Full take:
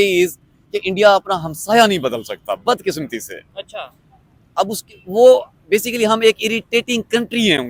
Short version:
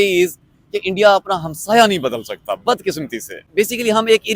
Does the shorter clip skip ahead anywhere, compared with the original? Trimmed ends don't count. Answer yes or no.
yes